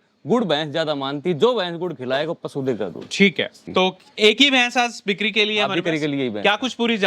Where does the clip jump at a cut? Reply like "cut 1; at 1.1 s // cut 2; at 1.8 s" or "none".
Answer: cut 1; at 3.6 s